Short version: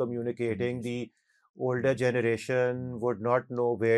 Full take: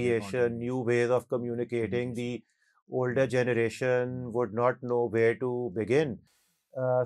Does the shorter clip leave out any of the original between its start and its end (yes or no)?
no